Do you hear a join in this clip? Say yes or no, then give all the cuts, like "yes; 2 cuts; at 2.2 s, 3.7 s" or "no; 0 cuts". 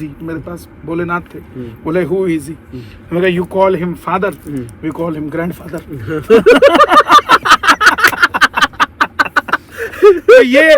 no; 0 cuts